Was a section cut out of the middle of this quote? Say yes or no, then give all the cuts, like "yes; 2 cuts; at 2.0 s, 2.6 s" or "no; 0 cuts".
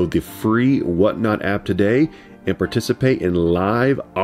no; 0 cuts